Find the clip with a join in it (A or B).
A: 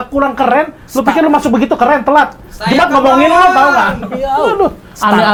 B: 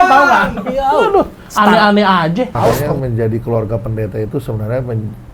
B